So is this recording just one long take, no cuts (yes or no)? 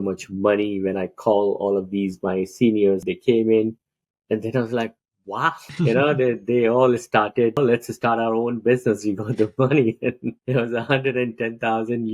no